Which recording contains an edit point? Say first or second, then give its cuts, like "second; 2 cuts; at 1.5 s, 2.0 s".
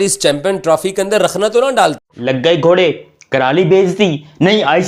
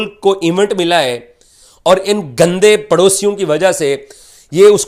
first; 1 cut; at 2.0 s